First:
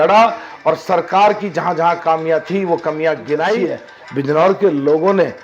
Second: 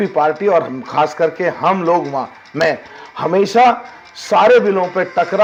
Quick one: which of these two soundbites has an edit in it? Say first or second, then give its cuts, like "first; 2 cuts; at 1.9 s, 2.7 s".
first; 1 cut; at 3.8 s